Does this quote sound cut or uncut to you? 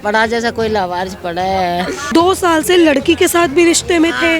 cut